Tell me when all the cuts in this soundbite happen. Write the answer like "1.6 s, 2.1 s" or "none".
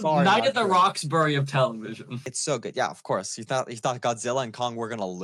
2.3 s